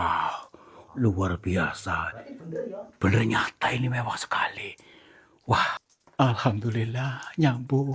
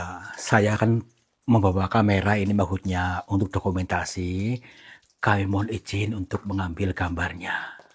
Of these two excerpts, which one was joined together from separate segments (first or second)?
first